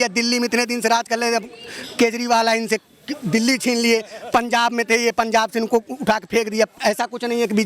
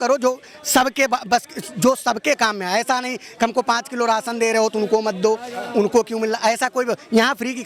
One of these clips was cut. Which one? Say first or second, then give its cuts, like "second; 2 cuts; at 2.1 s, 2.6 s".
first; 1 cut; at 6.8 s